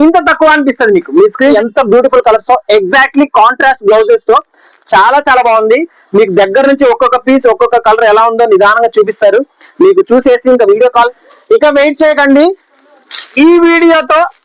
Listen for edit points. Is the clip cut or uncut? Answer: cut